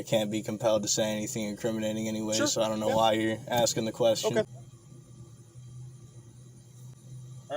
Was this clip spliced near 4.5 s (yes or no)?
yes